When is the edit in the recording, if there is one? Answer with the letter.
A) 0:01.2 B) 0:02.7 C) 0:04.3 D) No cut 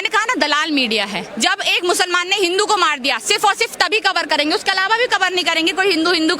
A